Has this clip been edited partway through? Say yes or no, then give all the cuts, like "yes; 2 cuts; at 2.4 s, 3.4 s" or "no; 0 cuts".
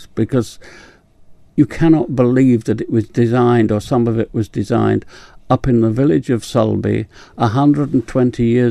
no; 0 cuts